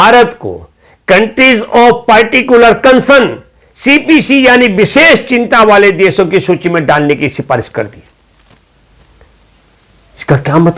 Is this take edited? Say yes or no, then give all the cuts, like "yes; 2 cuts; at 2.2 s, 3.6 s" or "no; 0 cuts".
no; 0 cuts